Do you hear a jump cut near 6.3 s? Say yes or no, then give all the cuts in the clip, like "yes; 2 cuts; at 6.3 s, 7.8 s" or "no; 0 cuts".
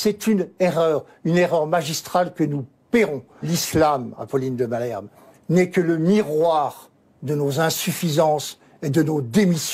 no; 1 cut; at 3.5 s